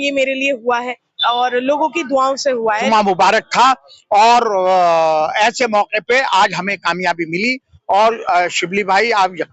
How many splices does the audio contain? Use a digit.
1